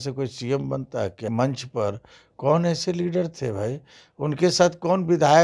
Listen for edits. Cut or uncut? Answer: cut